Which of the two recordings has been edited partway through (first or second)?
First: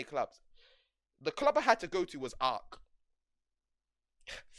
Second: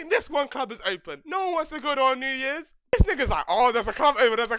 second